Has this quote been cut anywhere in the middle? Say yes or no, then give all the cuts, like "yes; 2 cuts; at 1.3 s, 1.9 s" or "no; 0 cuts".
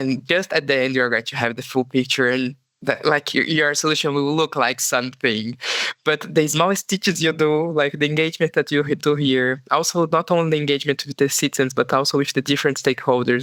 no; 0 cuts